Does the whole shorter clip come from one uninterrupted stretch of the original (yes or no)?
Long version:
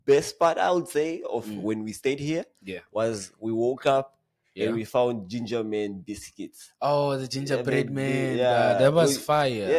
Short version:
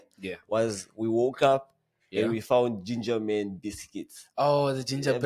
yes